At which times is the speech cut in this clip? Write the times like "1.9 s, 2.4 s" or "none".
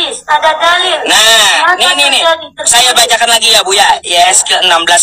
1.4 s